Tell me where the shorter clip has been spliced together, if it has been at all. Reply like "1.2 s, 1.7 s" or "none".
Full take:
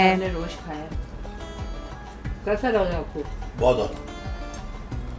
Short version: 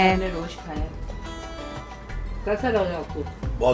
none

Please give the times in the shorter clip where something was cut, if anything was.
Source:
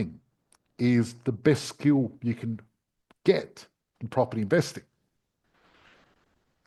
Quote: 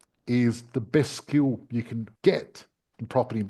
2.0 s

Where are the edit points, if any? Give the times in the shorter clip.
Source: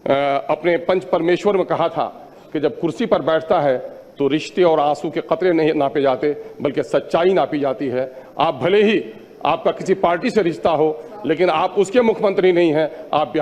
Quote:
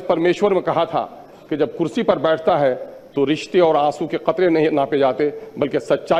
none

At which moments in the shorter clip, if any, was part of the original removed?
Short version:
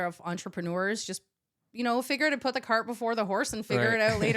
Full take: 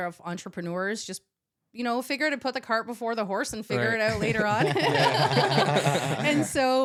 none

